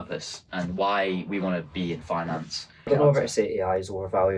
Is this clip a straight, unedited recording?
no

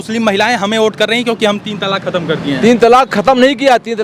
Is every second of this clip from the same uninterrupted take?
yes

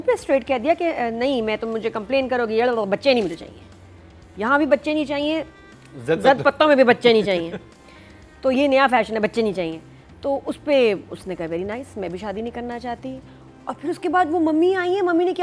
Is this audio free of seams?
yes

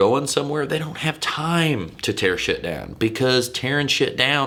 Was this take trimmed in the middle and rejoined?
no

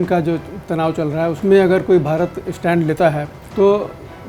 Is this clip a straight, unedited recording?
no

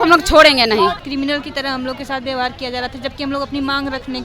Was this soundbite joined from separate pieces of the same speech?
yes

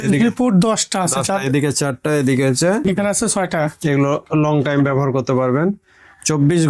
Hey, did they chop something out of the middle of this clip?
yes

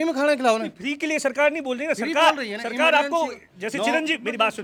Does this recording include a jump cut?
no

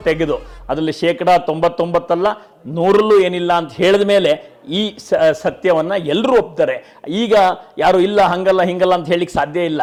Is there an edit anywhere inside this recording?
no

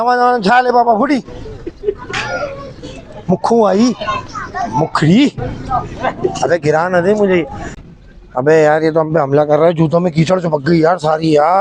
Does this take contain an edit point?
yes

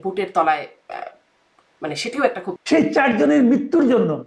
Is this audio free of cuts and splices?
no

